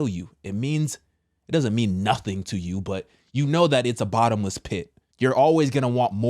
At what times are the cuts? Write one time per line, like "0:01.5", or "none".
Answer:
0:05.0